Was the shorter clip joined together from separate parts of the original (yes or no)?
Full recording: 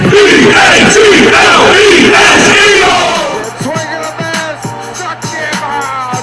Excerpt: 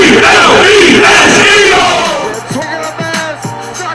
yes